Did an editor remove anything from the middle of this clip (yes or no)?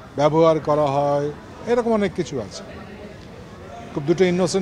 no